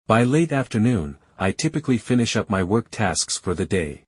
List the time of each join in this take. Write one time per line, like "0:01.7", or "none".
none

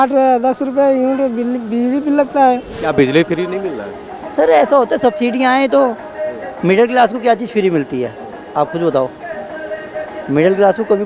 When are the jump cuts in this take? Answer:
0:02.7

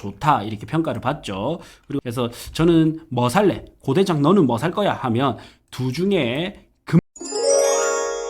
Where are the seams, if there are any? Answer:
0:02.0
0:07.0

